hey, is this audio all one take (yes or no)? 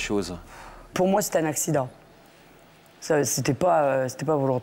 no